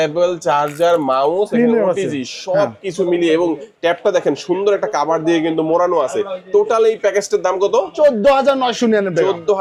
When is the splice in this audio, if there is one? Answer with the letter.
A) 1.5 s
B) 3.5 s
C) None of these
C